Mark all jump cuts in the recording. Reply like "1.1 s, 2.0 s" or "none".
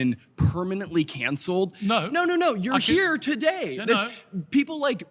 none